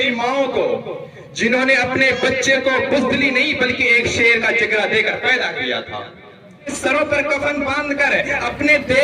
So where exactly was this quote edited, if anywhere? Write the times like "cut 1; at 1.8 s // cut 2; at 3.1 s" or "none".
cut 1; at 6.8 s